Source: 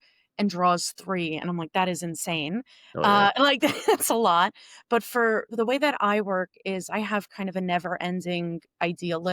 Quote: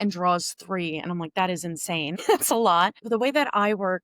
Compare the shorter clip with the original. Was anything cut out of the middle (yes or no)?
yes